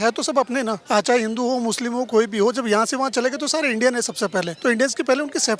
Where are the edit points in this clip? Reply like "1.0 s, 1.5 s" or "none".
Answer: 0.8 s, 4.5 s